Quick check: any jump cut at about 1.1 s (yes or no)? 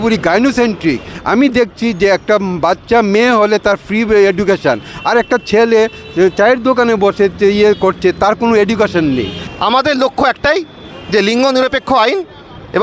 yes